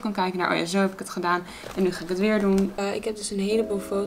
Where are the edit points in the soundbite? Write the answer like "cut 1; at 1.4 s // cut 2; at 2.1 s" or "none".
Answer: cut 1; at 2.8 s